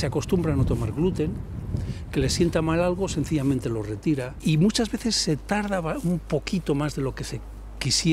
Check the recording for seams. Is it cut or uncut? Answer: cut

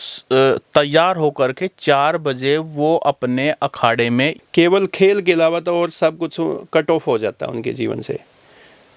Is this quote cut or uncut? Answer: cut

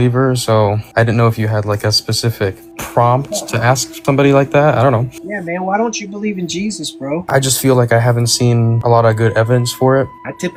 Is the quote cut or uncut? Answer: uncut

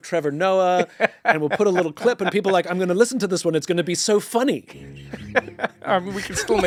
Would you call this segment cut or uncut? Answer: uncut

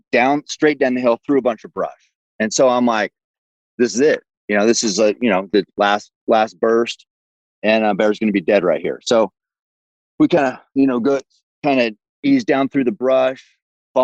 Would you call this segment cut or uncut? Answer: uncut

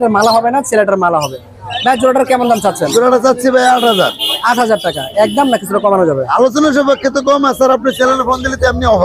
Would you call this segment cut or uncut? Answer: uncut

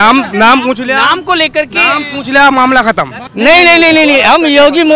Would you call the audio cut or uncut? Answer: cut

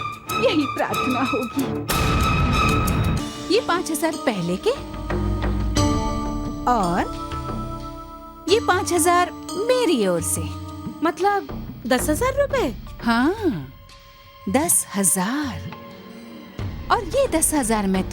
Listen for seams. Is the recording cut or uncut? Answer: cut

